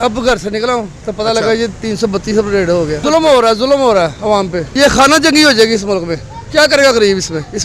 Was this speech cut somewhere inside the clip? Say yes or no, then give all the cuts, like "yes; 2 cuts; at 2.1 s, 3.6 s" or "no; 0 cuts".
no; 0 cuts